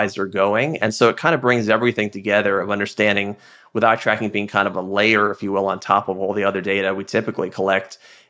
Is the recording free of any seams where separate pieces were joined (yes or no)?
yes